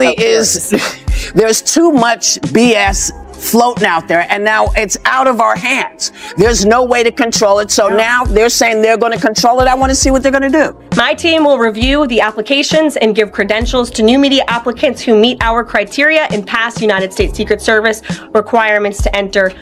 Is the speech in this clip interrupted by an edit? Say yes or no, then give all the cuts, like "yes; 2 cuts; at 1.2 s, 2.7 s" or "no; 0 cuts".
no; 0 cuts